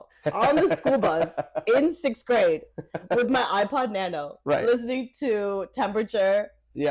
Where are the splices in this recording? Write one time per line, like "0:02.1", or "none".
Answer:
none